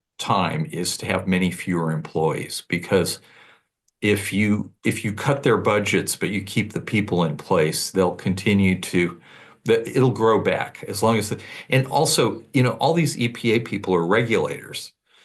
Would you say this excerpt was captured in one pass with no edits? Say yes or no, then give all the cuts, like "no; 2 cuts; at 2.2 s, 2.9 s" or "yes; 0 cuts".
yes; 0 cuts